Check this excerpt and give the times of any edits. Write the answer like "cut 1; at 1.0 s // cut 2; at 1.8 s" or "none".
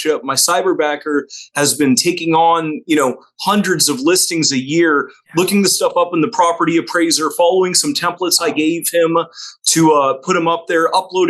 none